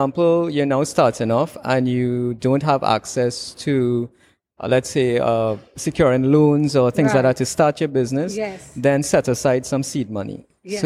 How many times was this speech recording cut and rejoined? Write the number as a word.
zero